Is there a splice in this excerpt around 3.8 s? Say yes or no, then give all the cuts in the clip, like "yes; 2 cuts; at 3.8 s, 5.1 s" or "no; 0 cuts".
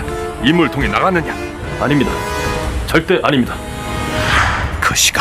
yes; 1 cut; at 3.8 s